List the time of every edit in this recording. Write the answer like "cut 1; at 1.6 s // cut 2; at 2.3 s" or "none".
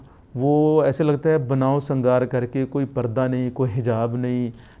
none